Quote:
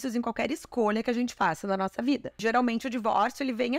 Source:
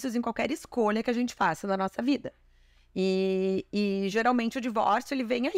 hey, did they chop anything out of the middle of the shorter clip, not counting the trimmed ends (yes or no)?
yes